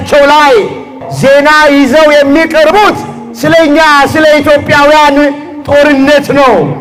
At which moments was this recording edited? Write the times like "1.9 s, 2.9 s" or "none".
none